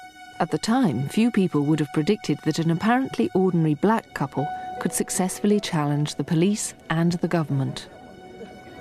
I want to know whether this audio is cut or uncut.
cut